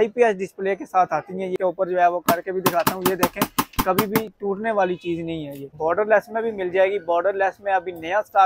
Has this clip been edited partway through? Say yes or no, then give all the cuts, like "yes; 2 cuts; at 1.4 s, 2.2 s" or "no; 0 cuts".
yes; 2 cuts; at 1.5 s, 5.7 s